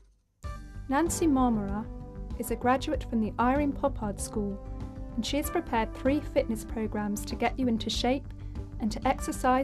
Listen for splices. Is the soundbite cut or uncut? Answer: uncut